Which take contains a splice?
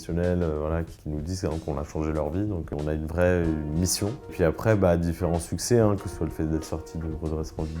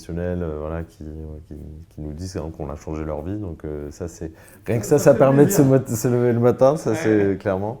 first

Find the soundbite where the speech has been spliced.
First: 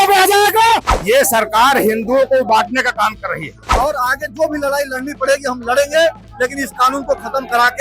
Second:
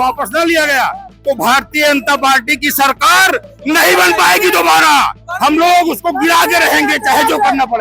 first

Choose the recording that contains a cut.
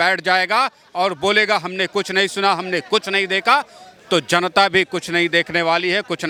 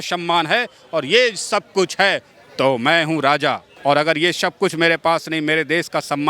second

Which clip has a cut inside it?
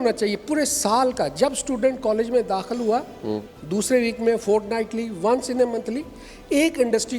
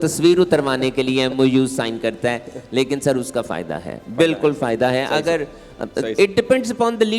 first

